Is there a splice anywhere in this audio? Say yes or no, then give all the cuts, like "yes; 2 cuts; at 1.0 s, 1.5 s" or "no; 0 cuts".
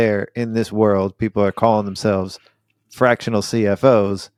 no; 0 cuts